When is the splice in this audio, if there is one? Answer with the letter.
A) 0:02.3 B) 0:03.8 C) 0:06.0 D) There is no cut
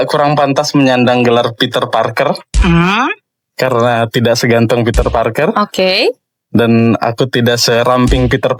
D